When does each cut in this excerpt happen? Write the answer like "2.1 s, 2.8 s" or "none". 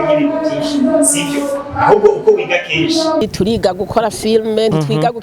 3.2 s